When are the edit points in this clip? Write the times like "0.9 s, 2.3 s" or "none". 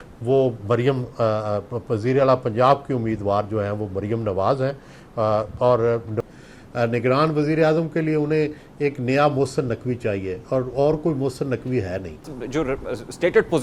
6.1 s, 12.3 s